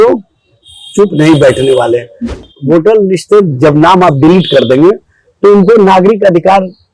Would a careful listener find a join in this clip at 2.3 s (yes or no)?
yes